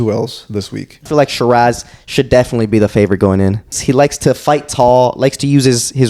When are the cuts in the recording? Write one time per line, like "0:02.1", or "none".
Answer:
0:01.1
0:03.8